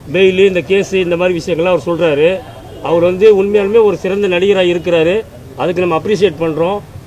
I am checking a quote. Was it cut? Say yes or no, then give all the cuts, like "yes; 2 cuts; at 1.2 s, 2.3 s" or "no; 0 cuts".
no; 0 cuts